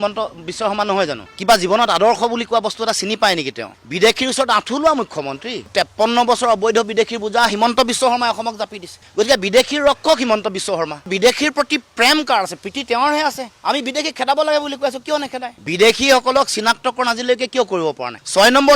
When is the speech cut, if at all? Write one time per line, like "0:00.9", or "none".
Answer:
0:01.3
0:03.7
0:05.7